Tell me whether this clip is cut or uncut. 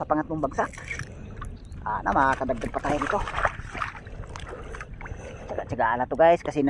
uncut